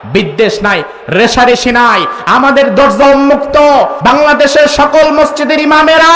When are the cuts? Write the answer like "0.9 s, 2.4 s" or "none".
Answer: 3.9 s

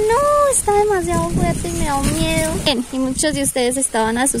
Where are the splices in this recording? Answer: 2.7 s

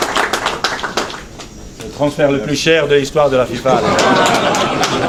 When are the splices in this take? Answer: none

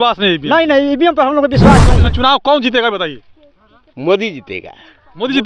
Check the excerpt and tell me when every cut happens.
2.0 s

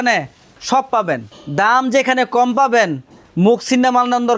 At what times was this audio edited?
1.3 s

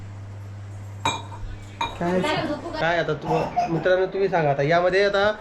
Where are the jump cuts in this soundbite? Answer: 2.8 s

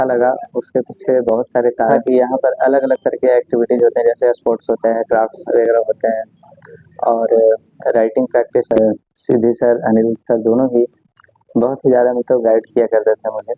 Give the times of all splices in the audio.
2.0 s, 8.7 s

